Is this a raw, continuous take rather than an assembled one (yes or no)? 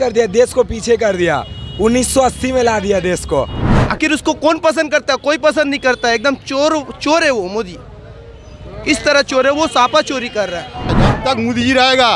no